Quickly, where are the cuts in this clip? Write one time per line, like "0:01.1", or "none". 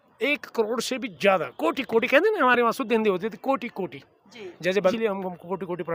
0:04.9